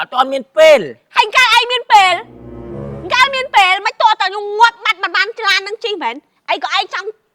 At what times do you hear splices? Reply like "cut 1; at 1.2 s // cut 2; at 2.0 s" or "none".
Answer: none

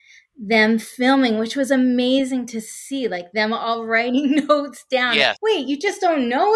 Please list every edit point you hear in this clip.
cut 1; at 5.4 s

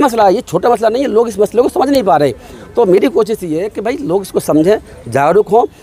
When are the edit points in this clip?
none

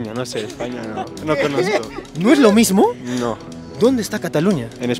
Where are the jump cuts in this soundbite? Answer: none

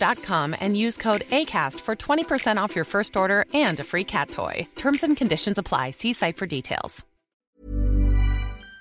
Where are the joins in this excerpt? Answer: cut 1; at 7.4 s

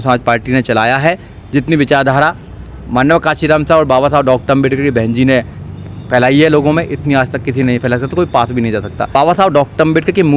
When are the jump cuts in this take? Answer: cut 1; at 9.0 s

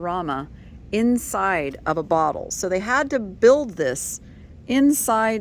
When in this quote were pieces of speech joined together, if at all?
none

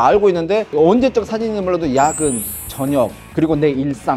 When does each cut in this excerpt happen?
none

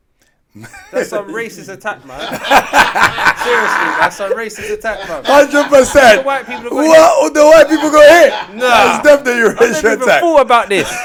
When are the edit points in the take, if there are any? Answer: none

